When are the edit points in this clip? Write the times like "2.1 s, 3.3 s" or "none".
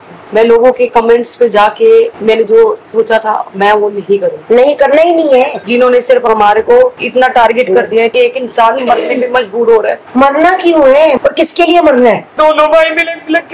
5.6 s, 8.1 s, 11.2 s, 12.3 s